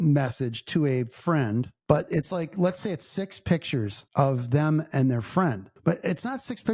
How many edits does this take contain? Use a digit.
1